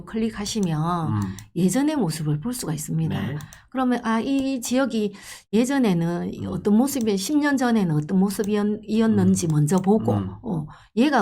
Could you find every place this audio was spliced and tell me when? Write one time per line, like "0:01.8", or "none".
none